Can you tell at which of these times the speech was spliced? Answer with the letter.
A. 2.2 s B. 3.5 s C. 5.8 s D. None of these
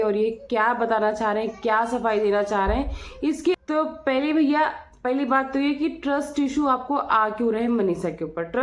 B